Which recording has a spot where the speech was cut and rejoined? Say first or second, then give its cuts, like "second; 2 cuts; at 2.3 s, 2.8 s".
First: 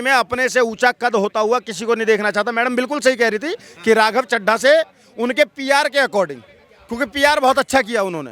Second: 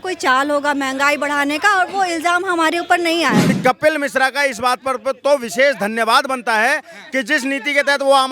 second; 1 cut; at 3.5 s